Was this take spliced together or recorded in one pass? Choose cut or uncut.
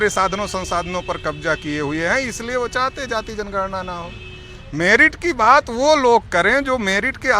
uncut